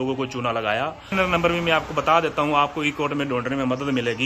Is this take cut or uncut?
cut